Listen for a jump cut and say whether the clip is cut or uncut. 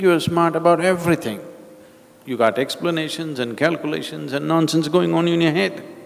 uncut